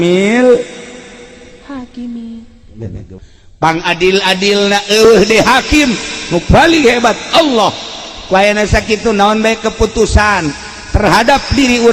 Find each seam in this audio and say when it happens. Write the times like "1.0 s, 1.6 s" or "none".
3.1 s